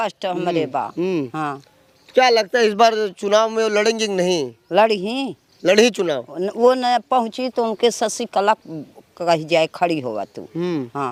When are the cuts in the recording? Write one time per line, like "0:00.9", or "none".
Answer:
none